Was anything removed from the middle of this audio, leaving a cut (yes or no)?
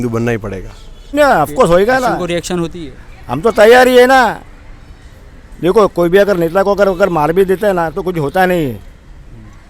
yes